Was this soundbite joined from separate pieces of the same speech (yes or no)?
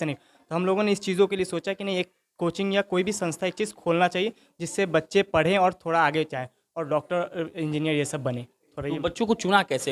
no